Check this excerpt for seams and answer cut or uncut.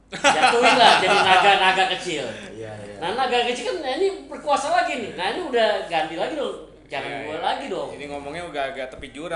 uncut